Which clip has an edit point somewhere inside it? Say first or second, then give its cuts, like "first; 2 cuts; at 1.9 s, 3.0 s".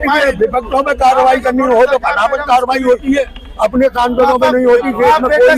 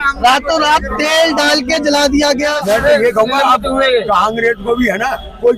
second; 1 cut; at 2.6 s